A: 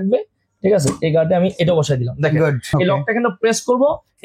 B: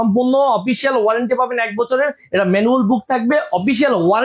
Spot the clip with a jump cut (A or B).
A